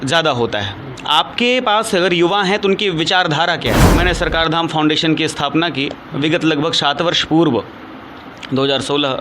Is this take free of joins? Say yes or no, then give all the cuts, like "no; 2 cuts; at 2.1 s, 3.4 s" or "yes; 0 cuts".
no; 1 cut; at 3.8 s